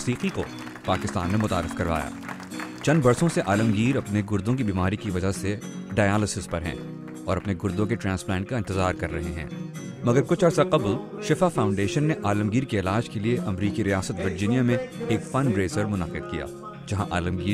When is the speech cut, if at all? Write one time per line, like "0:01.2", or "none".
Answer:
none